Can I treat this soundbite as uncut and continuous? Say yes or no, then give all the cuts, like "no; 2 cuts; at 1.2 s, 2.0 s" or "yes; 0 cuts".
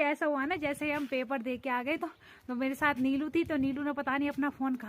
yes; 0 cuts